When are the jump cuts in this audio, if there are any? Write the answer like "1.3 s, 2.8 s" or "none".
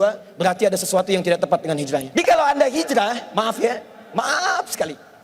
2.1 s